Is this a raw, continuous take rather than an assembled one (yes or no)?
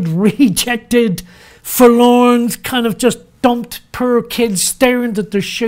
yes